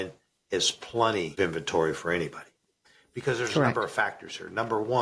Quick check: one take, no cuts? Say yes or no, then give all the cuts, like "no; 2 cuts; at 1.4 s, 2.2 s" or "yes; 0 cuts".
no; 1 cut; at 1.3 s